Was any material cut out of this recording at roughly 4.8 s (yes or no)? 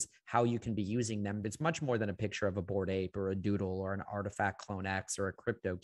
no